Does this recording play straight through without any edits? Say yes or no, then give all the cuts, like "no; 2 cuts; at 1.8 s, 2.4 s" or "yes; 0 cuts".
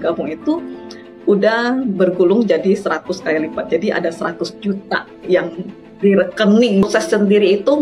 no; 1 cut; at 6.8 s